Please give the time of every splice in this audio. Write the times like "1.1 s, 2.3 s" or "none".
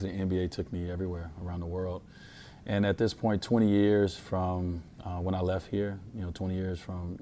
none